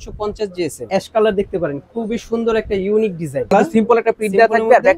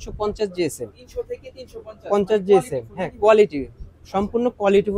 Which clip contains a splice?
first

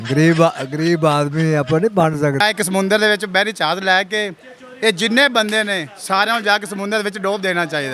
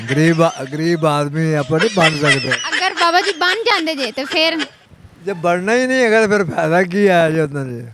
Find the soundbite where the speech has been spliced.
first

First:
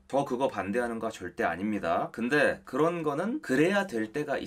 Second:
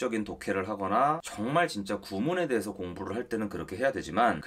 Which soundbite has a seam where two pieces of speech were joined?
first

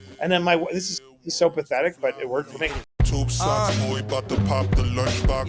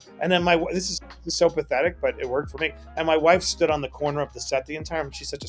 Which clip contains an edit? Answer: first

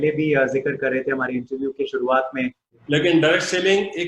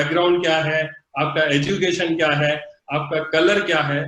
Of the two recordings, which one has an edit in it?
first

